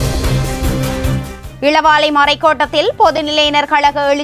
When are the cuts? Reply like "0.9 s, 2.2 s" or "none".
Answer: 1.4 s